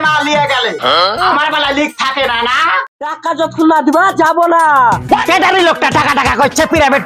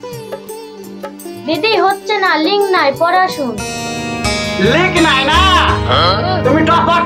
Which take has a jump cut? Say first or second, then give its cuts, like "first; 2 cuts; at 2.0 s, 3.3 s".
first; 1 cut; at 3.0 s